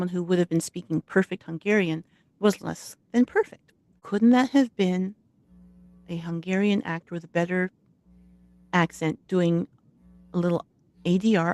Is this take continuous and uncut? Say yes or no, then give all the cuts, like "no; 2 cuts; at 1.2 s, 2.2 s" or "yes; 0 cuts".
no; 1 cut; at 4.0 s